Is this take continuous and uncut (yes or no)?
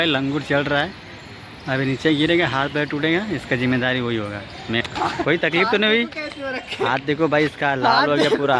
no